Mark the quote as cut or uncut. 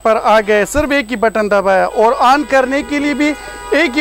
uncut